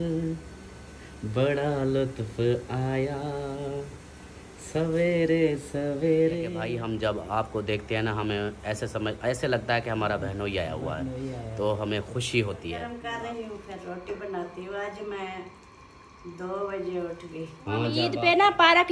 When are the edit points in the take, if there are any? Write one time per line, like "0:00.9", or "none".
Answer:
0:06.6
0:12.9
0:18.0